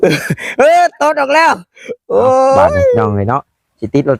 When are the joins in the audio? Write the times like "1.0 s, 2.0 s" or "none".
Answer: 3.0 s